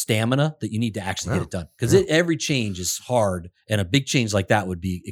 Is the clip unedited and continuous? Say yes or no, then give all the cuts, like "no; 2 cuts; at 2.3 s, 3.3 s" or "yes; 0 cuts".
no; 1 cut; at 3.5 s